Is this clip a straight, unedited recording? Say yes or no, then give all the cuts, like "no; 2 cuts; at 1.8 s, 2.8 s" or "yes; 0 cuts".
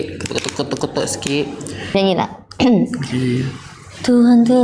no; 1 cut; at 1.9 s